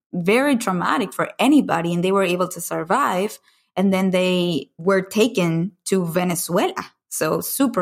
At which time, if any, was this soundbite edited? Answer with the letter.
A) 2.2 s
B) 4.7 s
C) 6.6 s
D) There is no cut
B